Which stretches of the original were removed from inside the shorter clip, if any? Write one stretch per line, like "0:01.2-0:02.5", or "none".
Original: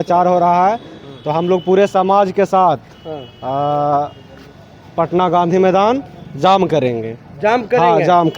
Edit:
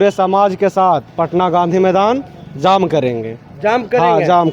0:02.8-0:04.9